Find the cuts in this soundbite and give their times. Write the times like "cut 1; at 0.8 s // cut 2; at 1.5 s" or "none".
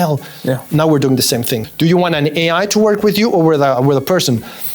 cut 1; at 1.6 s